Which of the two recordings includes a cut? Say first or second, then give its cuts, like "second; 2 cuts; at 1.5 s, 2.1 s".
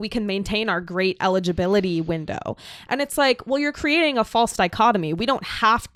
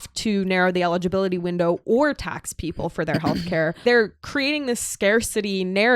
second; 1 cut; at 3.8 s